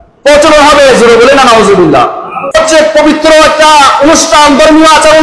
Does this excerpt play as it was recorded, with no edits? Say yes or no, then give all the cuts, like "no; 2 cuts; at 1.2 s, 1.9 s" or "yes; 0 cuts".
no; 1 cut; at 2.5 s